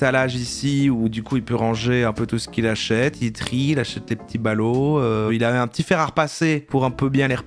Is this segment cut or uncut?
cut